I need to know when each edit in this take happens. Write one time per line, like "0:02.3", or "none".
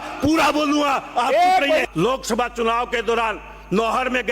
0:01.8